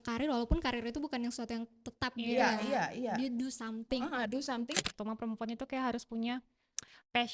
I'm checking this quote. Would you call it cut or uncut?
cut